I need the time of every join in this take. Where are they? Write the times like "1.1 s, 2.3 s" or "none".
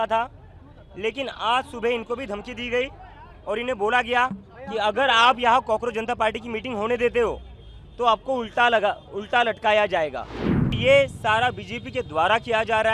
10.8 s